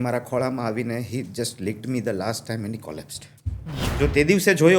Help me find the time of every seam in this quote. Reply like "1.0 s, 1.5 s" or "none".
3.9 s